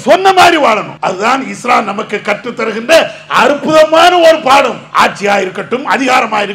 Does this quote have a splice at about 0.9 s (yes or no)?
yes